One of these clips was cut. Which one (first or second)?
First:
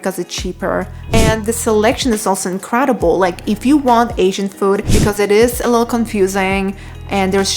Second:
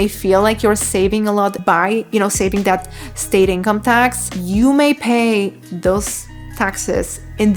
first